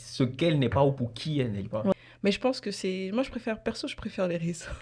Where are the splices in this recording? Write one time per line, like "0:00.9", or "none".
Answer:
0:01.9